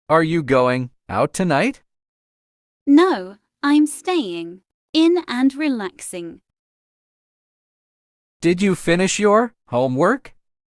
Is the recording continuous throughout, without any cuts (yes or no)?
no